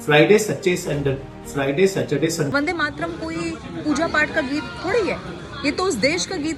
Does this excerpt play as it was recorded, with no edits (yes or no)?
no